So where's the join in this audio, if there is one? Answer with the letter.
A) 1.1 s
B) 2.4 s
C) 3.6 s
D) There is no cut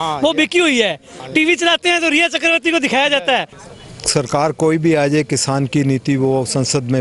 C